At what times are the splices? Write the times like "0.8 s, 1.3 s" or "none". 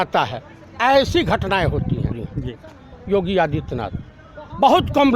2.2 s